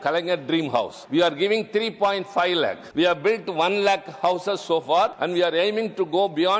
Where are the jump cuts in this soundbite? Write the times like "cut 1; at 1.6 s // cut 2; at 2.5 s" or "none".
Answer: cut 1; at 1.0 s // cut 2; at 2.8 s // cut 3; at 5.2 s